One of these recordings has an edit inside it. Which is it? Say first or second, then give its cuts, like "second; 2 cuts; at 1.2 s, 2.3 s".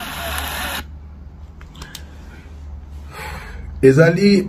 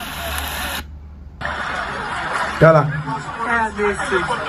second; 1 cut; at 1.4 s